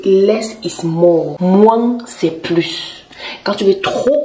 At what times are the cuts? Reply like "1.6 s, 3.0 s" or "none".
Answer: 1.3 s